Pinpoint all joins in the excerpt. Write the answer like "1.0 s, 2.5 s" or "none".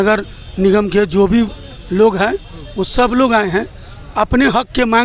none